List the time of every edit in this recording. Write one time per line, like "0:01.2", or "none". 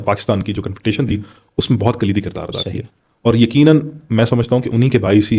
none